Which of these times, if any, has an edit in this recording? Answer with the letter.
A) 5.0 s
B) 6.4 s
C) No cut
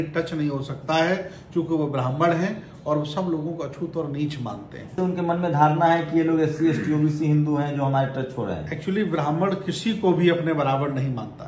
A